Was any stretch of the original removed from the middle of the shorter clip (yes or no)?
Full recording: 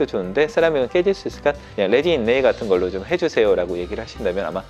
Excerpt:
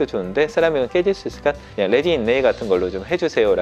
no